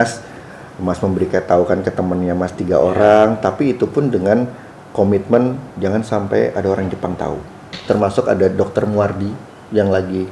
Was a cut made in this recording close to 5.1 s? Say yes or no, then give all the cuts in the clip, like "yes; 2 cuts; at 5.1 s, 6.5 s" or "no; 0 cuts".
no; 1 cut; at 7.8 s